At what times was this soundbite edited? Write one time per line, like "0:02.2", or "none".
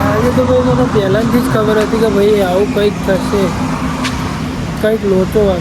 none